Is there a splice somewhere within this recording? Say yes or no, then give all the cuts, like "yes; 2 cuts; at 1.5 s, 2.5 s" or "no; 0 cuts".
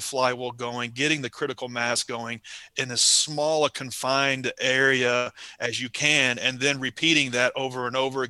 no; 0 cuts